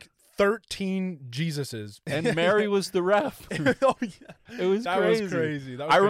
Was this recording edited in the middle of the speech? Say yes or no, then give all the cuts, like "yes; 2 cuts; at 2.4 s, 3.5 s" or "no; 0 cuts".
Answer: yes; 1 cut; at 2.0 s